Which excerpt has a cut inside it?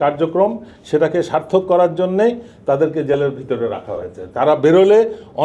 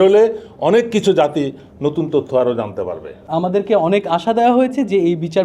second; 1 cut; at 3.2 s

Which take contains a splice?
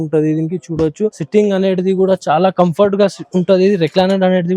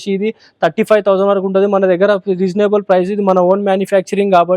first; 1 cut; at 1.2 s

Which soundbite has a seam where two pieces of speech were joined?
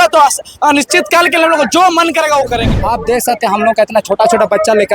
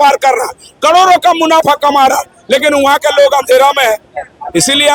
first; 1 cut; at 2.7 s

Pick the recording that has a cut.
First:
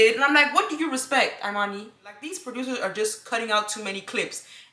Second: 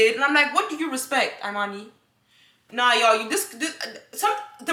first; 1 cut; at 2.4 s

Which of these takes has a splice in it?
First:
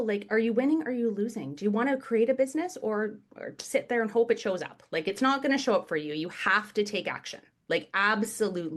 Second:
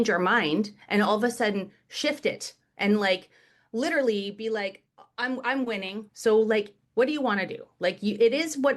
second; 2 cuts; at 6.0 s, 6.8 s

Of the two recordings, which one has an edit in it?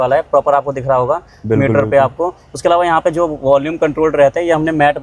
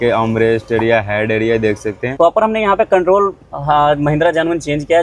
second; 1 cut; at 2.1 s

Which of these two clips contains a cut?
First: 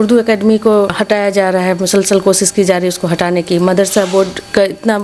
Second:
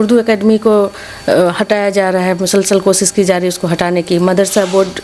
first; 1 cut; at 1.0 s

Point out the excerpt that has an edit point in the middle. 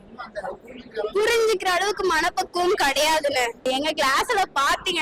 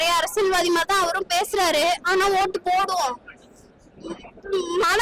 first; 1 cut; at 3.6 s

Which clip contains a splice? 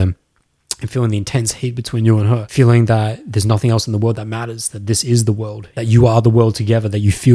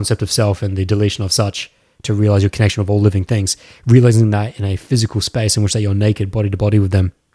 first; 1 cut; at 2.5 s

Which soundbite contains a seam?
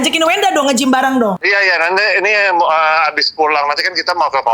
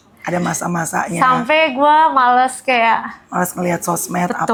first; 1 cut; at 1.4 s

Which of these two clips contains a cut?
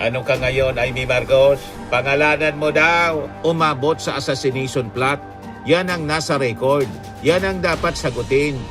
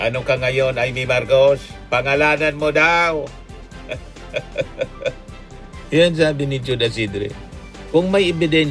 first; 1 cut; at 3.3 s

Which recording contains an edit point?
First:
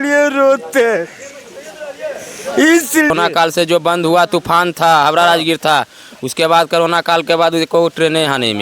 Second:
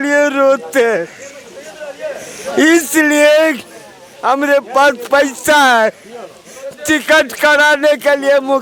first; 1 cut; at 3.1 s

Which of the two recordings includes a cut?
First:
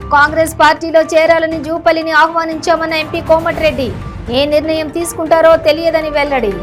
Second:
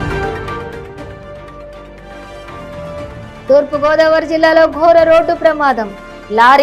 second; 1 cut; at 3.4 s

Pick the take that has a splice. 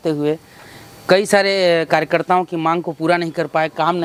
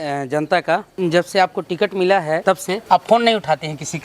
second; 2 cuts; at 0.9 s, 2.6 s

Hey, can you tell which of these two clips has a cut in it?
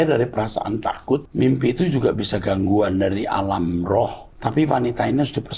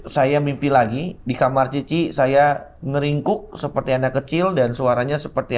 first; 2 cuts; at 1.3 s, 4.2 s

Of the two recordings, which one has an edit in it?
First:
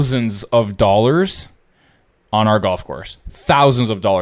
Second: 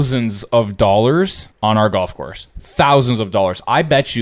second; 1 cut; at 1.4 s

